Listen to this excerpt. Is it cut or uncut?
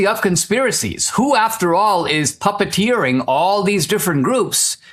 uncut